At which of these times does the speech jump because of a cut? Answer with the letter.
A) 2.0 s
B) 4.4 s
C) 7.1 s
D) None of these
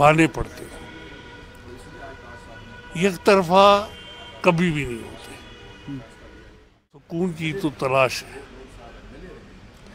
C